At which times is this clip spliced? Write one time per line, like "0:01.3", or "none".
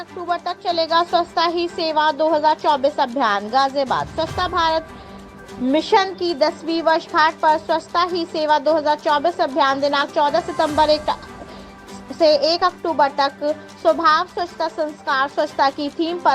none